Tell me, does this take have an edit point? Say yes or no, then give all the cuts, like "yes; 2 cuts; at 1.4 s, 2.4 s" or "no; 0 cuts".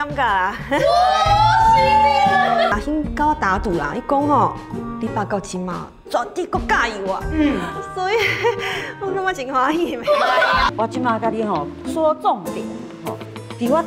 yes; 2 cuts; at 2.7 s, 10.7 s